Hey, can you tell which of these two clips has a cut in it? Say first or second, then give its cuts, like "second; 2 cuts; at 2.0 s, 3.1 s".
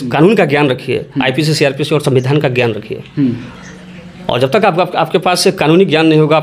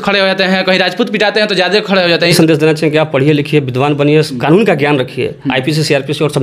second; 1 cut; at 2.3 s